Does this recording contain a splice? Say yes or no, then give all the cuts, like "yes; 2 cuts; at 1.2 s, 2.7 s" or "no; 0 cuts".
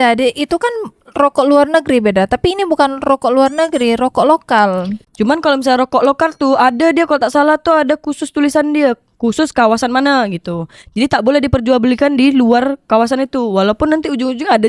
no; 0 cuts